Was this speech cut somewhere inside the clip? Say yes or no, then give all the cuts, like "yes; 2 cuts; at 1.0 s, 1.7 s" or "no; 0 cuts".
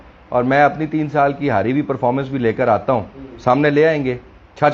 no; 0 cuts